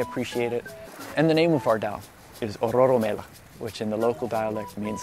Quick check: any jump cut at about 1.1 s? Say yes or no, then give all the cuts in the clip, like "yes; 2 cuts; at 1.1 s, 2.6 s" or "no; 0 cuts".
yes; 1 cut; at 1.1 s